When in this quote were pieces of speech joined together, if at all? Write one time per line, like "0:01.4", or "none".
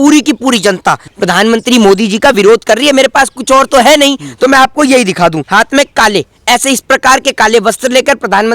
0:01.1
0:05.4